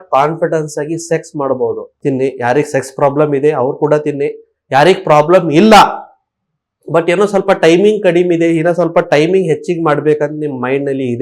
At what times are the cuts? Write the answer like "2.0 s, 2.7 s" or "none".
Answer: 1.9 s